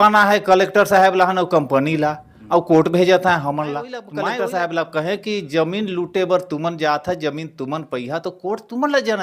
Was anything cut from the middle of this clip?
yes; 1 cut; at 4.0 s

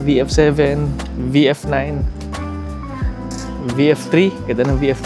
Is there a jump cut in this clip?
yes; 2 cuts; at 2.0 s, 3.6 s

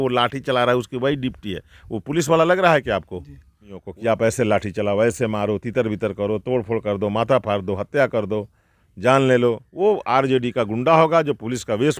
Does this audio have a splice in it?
yes; 2 cuts; at 3.9 s, 9.7 s

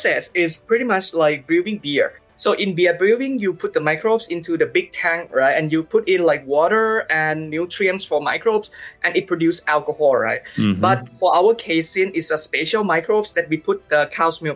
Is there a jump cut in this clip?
no; 0 cuts

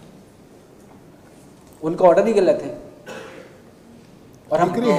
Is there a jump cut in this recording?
no; 0 cuts

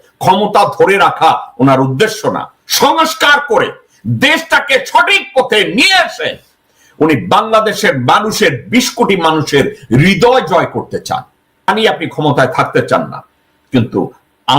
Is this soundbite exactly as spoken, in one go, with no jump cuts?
no; 1 cut; at 11.7 s

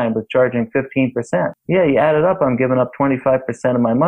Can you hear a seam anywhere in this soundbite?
yes; 1 cut; at 1.6 s

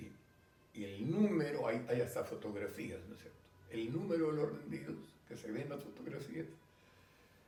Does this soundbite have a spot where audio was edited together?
no; 0 cuts

